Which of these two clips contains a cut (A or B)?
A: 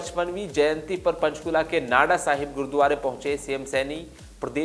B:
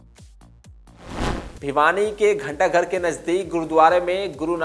B